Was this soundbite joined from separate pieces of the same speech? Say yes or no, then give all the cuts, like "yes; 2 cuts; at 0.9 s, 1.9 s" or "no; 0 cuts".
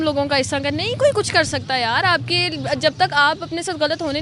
no; 0 cuts